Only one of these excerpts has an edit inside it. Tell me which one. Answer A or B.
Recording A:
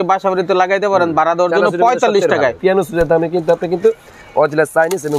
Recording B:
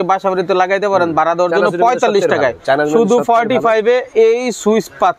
A